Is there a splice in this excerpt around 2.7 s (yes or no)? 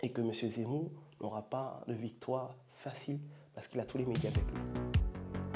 no